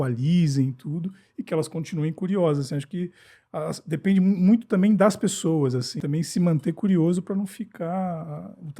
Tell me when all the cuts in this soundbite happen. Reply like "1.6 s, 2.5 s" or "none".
5.9 s